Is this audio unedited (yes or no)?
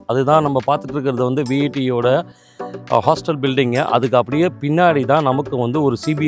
yes